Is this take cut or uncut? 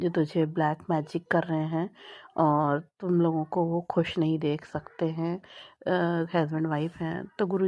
uncut